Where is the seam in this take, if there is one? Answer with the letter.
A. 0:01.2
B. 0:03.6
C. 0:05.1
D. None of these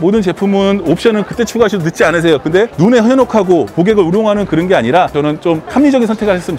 C